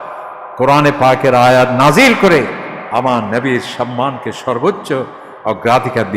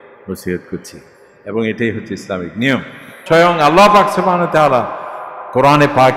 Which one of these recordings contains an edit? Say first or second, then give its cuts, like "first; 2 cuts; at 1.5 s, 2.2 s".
second; 1 cut; at 3.2 s